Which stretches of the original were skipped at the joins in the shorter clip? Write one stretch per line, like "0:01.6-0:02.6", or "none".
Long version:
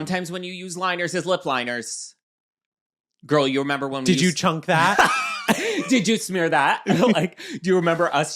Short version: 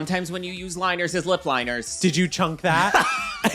0:01.9-0:04.0